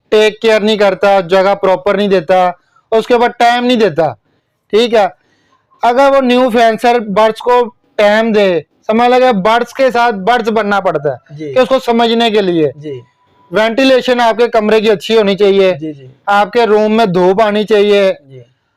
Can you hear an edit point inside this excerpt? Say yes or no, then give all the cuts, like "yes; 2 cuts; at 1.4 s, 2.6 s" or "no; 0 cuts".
no; 0 cuts